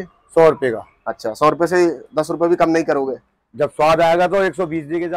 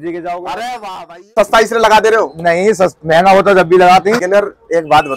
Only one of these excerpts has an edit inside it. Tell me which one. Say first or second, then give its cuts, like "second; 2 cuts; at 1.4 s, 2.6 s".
second; 2 cuts; at 1.3 s, 4.2 s